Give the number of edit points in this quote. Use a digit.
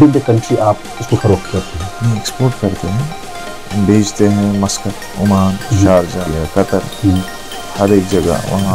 1